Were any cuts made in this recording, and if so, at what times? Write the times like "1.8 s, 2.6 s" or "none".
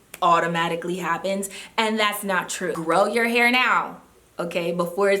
2.8 s